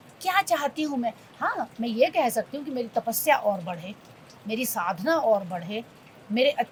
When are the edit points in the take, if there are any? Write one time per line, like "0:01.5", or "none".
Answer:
none